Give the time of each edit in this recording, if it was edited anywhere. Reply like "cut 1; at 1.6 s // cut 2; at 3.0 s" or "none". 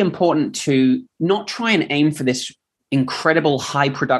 cut 1; at 1.1 s